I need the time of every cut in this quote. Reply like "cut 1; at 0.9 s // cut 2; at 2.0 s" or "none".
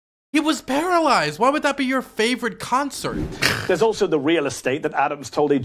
cut 1; at 3.3 s